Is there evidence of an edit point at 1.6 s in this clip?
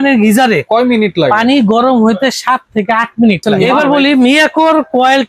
no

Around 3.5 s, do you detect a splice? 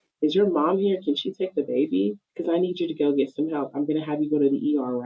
no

